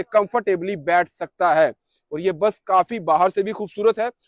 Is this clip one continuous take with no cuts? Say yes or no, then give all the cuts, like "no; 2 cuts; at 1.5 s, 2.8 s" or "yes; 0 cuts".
yes; 0 cuts